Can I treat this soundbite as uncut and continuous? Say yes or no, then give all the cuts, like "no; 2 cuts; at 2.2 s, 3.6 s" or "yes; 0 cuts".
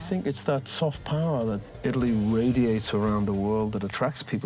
yes; 0 cuts